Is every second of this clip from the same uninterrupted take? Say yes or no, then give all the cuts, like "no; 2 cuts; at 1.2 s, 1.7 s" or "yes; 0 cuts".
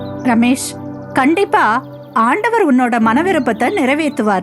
no; 1 cut; at 1.9 s